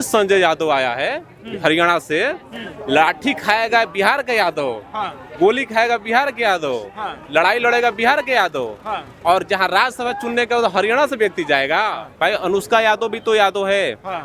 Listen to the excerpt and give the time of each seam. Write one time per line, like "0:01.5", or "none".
0:12.0

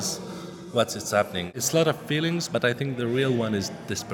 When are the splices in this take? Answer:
0:01.5

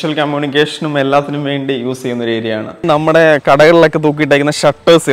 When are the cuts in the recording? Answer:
0:02.8

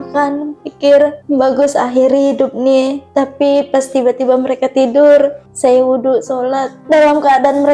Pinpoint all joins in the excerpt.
0:01.2
0:03.0
0:05.4
0:06.7

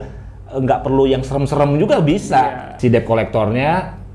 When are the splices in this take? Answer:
0:02.7

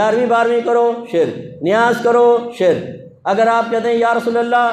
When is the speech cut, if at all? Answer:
none

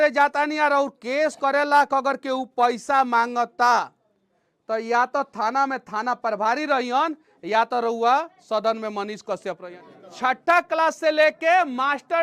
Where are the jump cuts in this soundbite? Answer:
0:09.7

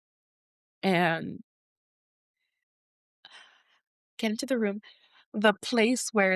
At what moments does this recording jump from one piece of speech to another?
0:01.5

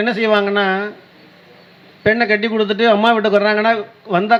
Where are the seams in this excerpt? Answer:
none

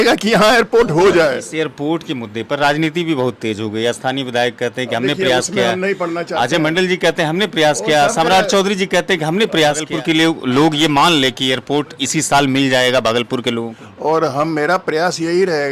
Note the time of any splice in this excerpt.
0:01.4
0:09.8
0:13.8

